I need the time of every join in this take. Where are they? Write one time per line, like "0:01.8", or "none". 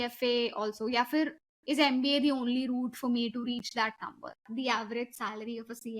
0:04.4